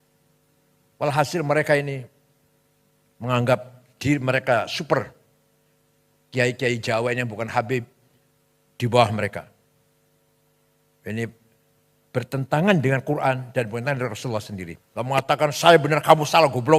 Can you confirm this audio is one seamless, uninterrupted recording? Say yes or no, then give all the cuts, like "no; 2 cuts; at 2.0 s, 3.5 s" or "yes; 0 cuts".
no; 1 cut; at 14.8 s